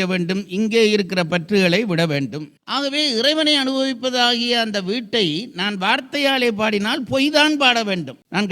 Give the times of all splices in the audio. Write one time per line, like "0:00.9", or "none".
0:02.5